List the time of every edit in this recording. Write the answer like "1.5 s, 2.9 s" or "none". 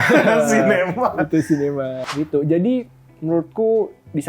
1.9 s